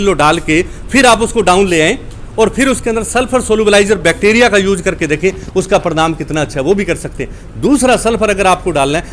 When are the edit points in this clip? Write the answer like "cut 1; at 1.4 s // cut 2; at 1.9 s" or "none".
none